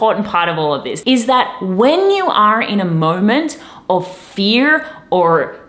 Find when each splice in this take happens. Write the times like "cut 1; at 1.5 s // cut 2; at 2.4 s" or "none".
cut 1; at 0.9 s